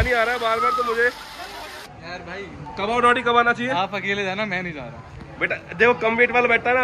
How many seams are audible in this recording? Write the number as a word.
one